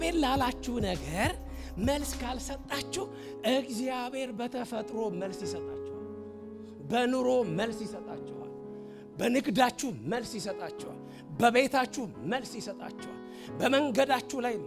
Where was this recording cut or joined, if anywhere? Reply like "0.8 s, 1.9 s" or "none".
none